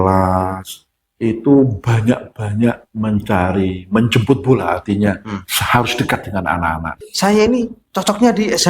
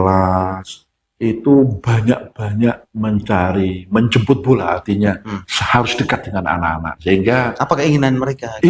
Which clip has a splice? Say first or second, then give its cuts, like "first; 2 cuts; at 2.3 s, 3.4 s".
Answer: first; 1 cut; at 7.0 s